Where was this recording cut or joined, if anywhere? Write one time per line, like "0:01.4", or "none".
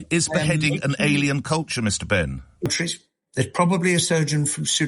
0:02.7